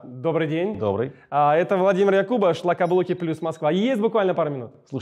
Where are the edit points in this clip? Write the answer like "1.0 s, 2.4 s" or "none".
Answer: none